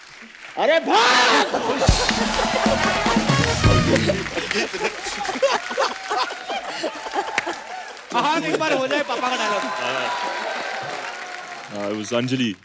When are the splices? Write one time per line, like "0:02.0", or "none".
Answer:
0:08.0